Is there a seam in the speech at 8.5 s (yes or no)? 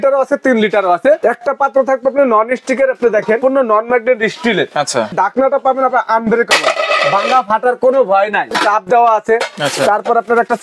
yes